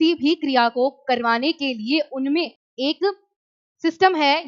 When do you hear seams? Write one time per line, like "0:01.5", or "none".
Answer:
0:02.6